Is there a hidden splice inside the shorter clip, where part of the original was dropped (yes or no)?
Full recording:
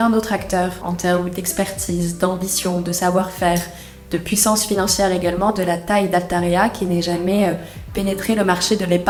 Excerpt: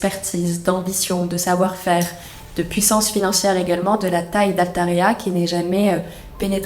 no